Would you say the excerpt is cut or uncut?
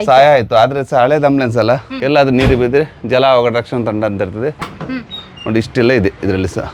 cut